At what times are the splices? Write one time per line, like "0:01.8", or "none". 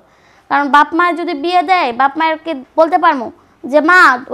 0:02.6